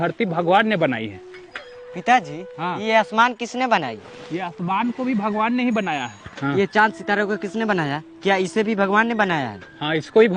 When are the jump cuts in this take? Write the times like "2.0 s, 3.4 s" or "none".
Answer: none